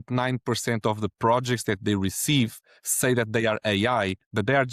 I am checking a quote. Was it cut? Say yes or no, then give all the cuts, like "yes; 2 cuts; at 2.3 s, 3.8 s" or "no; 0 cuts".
no; 0 cuts